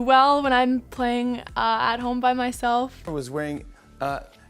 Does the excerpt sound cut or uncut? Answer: cut